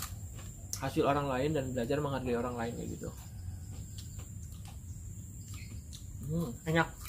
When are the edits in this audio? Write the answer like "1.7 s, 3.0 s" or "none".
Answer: none